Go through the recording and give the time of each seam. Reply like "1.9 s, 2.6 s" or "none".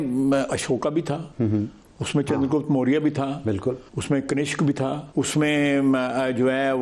1.3 s, 3.9 s, 5.0 s